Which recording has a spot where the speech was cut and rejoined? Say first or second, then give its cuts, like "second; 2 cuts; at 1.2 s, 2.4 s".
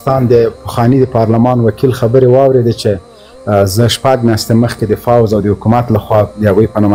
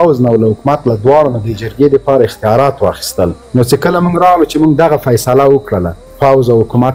second; 2 cuts; at 3.4 s, 6.0 s